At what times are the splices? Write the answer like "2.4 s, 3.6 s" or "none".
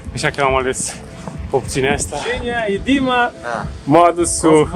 2.2 s